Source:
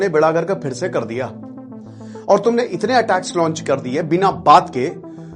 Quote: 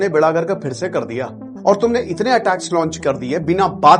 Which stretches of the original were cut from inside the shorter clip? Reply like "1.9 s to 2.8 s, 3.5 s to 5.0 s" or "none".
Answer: 1.7 s to 2.3 s